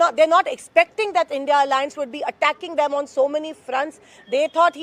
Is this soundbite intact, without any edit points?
yes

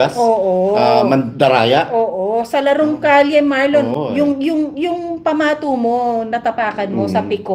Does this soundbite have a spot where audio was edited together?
no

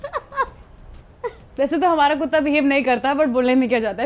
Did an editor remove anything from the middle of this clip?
no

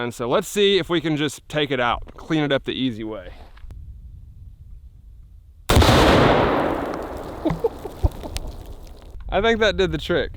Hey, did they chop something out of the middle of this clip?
yes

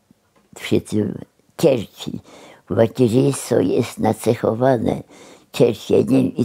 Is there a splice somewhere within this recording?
no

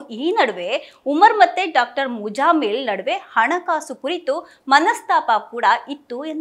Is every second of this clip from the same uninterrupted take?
yes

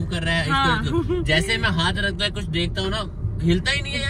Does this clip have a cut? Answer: no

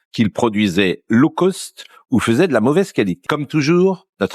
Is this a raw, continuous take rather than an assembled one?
no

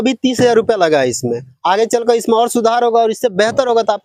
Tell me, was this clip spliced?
no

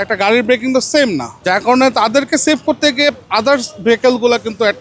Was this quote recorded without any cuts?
no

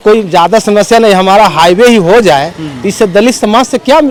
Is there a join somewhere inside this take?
no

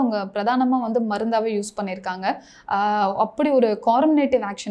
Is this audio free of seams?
yes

